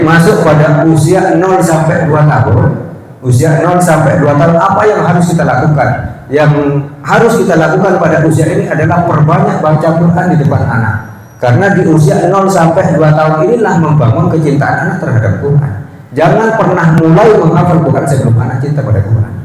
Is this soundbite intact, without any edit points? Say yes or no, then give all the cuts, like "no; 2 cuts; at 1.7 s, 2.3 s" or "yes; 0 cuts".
yes; 0 cuts